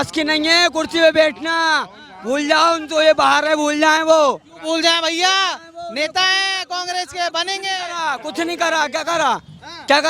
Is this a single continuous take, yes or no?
yes